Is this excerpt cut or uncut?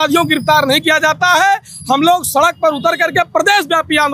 uncut